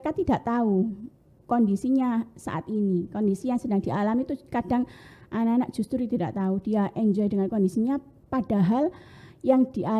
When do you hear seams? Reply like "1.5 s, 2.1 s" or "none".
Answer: none